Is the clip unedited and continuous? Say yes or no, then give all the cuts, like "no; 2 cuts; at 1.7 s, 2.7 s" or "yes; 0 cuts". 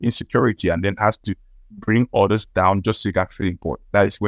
yes; 0 cuts